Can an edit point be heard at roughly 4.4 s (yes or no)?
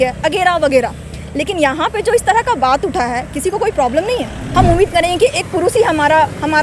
yes